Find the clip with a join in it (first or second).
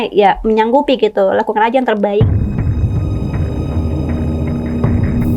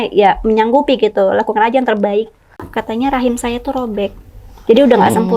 second